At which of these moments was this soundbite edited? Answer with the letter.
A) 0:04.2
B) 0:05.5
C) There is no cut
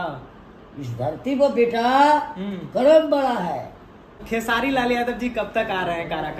A